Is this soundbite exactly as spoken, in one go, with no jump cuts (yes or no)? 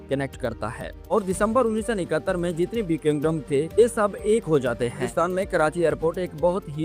no